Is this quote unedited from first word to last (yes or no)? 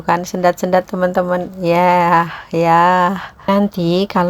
no